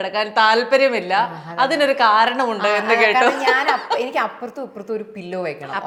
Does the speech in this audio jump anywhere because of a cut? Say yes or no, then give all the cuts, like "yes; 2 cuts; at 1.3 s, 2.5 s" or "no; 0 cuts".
no; 0 cuts